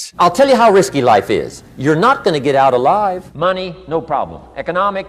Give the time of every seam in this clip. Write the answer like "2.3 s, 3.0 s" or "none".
3.3 s